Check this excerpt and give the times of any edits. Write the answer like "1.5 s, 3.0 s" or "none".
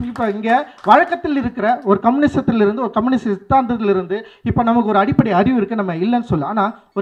none